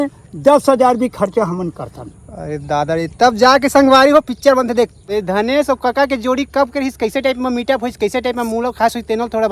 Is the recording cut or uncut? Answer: cut